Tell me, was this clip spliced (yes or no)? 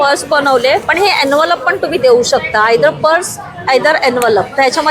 no